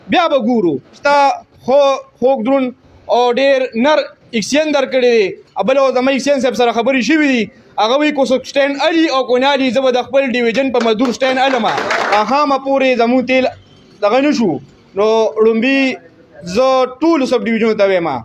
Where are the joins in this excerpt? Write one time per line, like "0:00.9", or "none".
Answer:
0:01.0
0:12.1